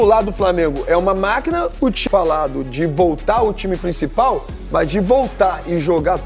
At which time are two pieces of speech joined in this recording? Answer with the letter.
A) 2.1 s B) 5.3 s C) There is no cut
A